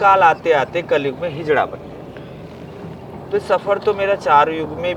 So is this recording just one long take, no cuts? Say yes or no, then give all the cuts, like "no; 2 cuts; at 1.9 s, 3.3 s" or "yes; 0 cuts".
yes; 0 cuts